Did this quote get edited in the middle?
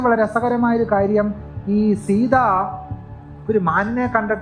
no; 0 cuts

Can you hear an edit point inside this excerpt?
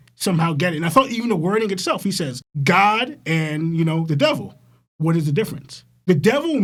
no; 0 cuts

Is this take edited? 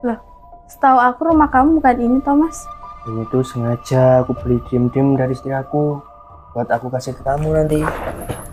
no; 0 cuts

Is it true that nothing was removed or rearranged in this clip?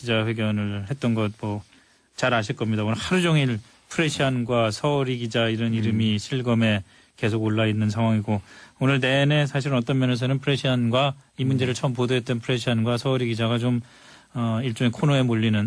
yes; 0 cuts

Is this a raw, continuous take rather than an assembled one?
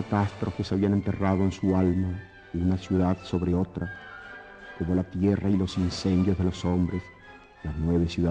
yes; 0 cuts

